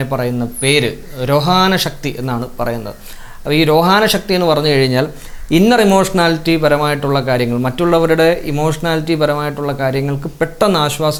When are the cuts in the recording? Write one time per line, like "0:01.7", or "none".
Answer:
none